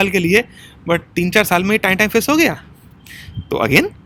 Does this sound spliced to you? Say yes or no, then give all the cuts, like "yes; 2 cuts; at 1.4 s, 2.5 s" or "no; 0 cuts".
no; 0 cuts